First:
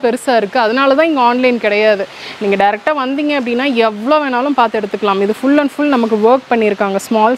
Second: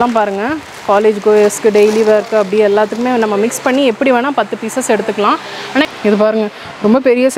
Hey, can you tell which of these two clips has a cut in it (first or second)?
second